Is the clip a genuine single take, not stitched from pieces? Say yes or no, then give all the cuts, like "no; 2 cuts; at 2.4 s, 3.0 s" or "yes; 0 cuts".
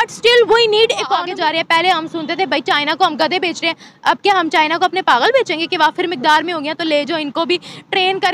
no; 1 cut; at 1.2 s